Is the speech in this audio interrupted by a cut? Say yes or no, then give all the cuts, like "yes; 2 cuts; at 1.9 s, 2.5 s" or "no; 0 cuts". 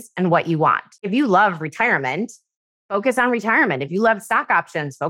yes; 1 cut; at 1.0 s